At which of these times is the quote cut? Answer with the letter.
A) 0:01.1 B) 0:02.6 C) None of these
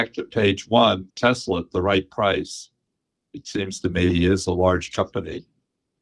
A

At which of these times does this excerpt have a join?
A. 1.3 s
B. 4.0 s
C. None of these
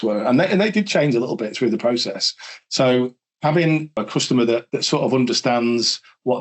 B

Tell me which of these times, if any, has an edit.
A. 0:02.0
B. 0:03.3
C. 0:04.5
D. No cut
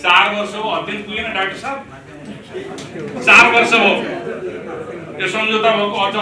D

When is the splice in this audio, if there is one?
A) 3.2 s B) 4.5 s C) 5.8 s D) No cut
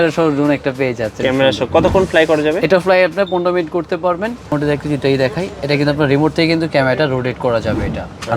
B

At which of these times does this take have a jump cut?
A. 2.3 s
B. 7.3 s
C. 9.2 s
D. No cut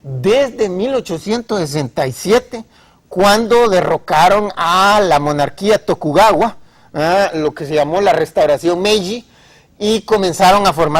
B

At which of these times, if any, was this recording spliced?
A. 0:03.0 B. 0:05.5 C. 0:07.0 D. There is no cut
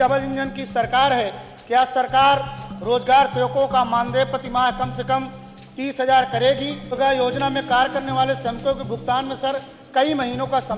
C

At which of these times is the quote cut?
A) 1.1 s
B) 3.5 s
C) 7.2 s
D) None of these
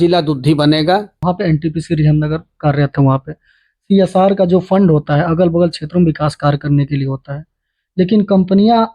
A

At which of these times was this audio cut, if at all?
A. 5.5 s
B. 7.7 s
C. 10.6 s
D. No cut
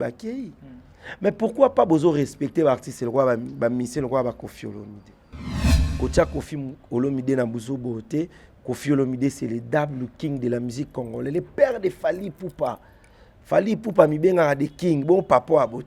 A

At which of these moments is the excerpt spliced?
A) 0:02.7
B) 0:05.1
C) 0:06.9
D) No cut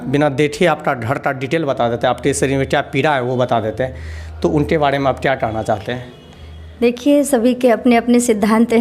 D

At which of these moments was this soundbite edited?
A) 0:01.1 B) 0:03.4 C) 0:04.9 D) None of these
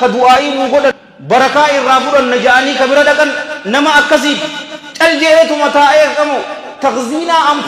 A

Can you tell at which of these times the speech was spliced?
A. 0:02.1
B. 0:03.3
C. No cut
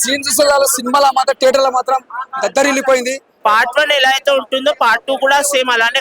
B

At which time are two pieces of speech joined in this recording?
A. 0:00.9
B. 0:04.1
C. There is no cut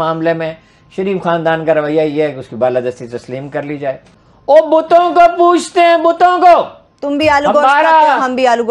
B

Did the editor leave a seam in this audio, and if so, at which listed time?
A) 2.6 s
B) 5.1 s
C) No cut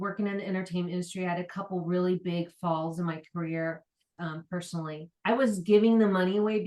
B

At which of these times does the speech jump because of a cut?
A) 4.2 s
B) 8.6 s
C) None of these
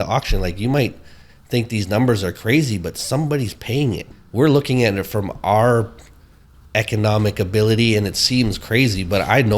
A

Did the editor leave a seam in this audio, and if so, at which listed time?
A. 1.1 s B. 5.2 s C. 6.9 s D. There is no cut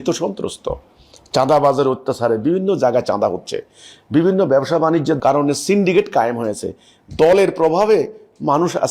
B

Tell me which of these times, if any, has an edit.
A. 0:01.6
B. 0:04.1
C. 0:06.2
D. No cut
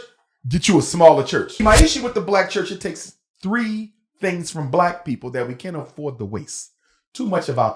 A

